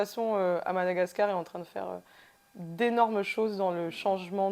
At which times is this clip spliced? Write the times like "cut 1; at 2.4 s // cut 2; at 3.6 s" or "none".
none